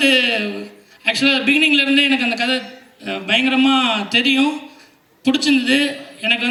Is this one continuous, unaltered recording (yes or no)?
yes